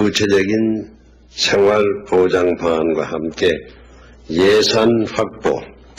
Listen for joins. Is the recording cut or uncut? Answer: uncut